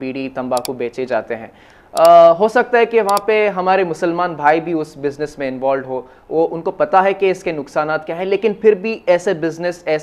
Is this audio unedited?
yes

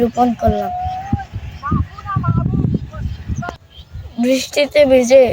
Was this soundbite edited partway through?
no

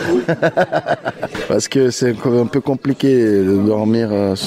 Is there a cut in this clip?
yes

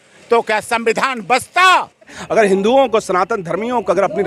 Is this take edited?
yes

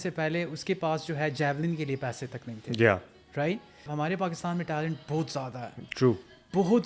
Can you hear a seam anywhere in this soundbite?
yes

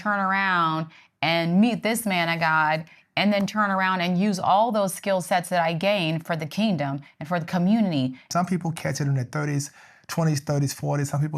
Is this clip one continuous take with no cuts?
no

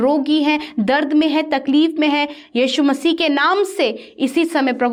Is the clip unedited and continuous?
yes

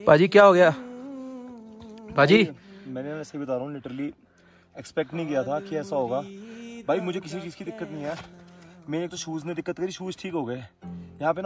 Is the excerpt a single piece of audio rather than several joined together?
yes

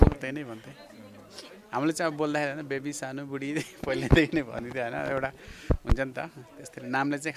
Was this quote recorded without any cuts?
yes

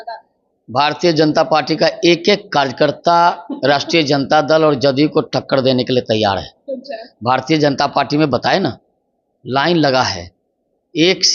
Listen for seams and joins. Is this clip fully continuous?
yes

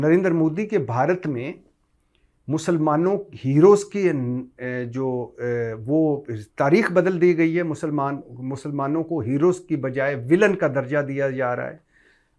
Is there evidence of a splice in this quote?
no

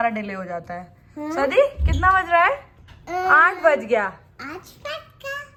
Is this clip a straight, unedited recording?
yes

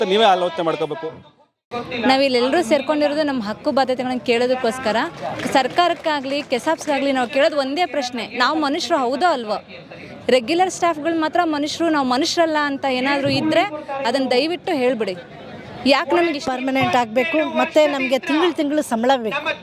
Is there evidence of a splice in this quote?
yes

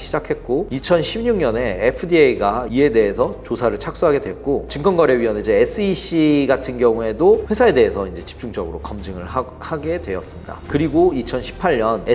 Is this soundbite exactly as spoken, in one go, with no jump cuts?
yes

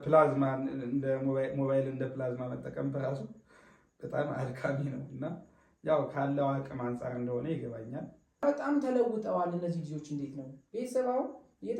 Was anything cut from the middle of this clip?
yes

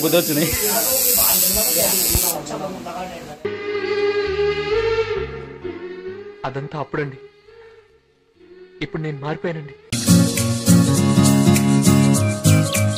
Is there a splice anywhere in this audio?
no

